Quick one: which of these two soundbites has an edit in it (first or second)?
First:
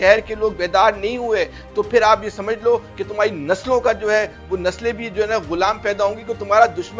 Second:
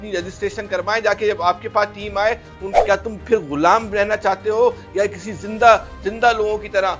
second